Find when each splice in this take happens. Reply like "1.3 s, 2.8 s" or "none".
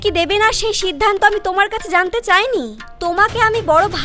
none